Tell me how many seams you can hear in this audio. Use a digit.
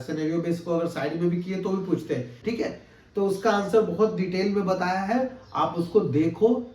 1